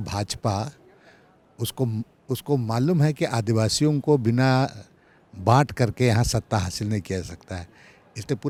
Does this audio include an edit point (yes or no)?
no